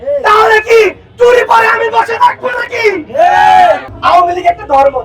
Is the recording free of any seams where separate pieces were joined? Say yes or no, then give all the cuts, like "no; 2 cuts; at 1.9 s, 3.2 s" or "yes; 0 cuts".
no; 1 cut; at 3.9 s